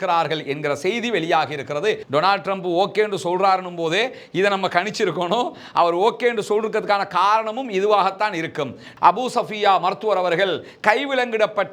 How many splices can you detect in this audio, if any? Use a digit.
2